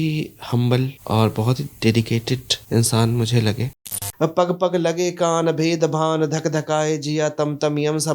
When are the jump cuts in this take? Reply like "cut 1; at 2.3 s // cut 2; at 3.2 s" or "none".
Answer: cut 1; at 1.0 s // cut 2; at 2.5 s // cut 3; at 4.1 s